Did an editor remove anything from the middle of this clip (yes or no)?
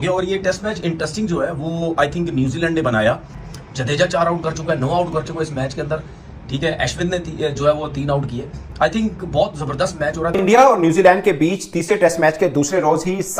yes